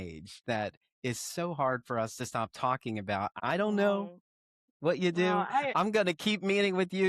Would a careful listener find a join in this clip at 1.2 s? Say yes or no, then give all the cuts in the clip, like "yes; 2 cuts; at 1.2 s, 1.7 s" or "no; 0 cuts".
no; 1 cut; at 3.2 s